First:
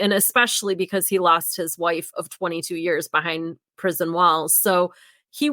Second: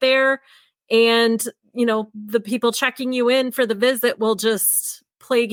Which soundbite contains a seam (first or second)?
first